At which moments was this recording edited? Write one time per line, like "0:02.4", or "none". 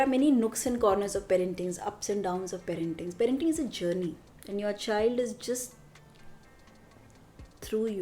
0:04.3